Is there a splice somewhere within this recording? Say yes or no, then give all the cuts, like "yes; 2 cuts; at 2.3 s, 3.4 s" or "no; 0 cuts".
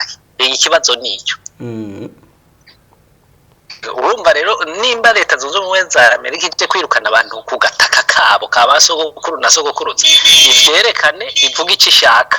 no; 0 cuts